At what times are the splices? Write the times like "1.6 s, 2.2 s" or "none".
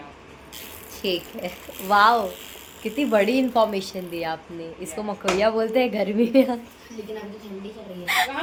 none